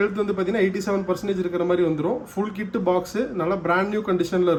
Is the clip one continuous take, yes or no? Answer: yes